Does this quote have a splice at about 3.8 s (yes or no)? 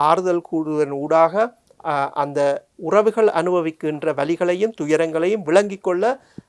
no